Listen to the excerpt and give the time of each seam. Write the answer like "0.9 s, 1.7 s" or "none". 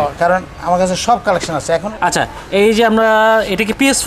1.9 s